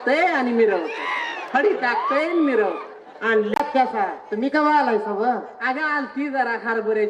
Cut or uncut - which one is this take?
cut